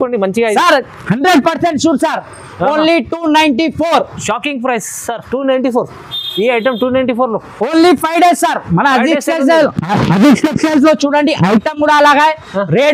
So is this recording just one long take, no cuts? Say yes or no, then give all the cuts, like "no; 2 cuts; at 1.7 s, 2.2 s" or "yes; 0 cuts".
yes; 0 cuts